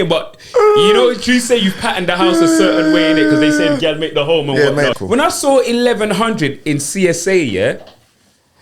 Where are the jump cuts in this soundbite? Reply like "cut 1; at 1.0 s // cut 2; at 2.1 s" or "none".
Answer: cut 1; at 4.9 s